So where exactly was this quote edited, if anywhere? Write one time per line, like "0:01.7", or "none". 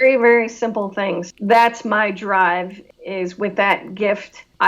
0:01.3